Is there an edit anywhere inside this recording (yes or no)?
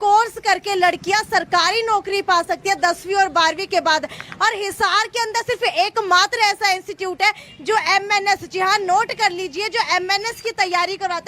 no